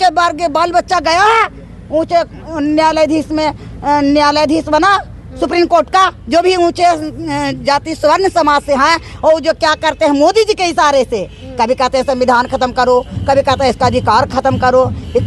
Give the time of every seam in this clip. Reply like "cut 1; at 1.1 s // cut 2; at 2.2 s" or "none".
none

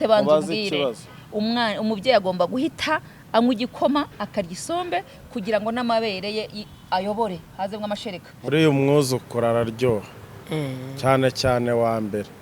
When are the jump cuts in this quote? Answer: cut 1; at 8.5 s

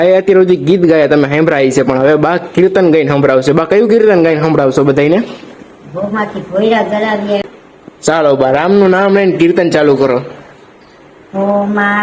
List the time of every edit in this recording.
cut 1; at 7.4 s

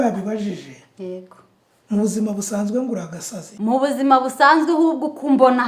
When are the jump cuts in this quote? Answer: cut 1; at 3.5 s

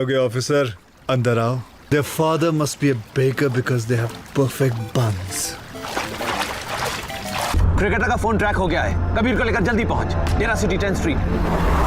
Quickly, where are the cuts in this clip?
cut 1; at 1.8 s

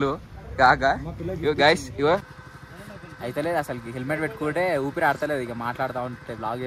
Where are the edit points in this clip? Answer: cut 1; at 2.4 s

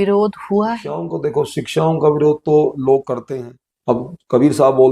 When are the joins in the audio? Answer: cut 1; at 1.1 s // cut 2; at 3.2 s

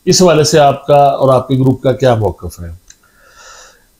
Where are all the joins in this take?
none

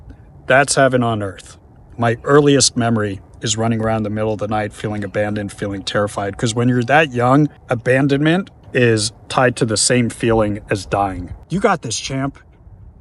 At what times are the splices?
cut 1; at 1.9 s // cut 2; at 7.6 s // cut 3; at 8.6 s // cut 4; at 11.3 s

